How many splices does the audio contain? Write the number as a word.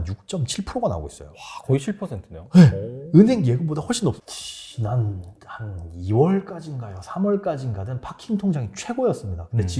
one